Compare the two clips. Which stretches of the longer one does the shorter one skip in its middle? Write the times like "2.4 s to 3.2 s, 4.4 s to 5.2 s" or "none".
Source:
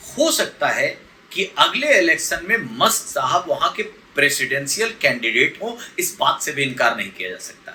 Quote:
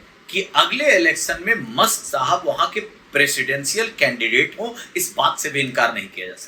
none